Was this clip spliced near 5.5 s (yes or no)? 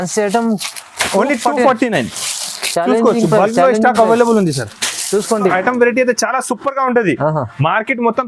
yes